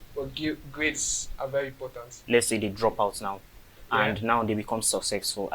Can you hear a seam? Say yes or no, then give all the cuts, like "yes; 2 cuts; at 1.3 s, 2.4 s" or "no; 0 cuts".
yes; 1 cut; at 2.2 s